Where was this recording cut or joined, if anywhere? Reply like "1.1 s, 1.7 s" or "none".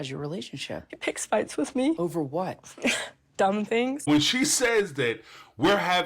0.9 s, 2.0 s, 4.1 s